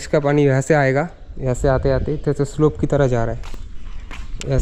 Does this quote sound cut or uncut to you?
uncut